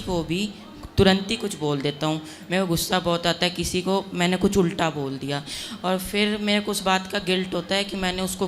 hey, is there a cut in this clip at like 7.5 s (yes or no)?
no